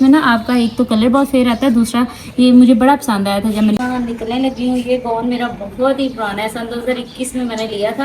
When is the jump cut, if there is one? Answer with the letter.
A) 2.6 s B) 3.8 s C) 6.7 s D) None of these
B